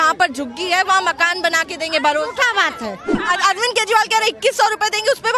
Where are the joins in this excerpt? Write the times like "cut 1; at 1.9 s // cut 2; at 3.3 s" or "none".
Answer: cut 1; at 3.1 s